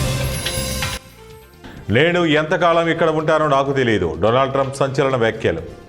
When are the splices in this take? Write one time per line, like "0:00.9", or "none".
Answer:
0:01.1